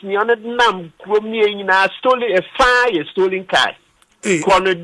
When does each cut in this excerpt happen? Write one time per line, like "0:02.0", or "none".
0:00.9